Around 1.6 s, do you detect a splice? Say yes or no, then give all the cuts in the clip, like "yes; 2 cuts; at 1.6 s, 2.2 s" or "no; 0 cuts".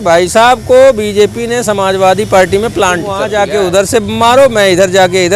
no; 1 cut; at 3.2 s